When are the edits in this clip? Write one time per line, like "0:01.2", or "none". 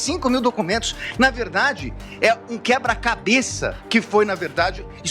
0:03.7